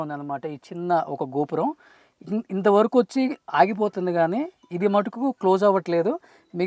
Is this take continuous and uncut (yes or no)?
yes